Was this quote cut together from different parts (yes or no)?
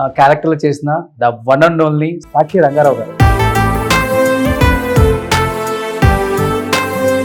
no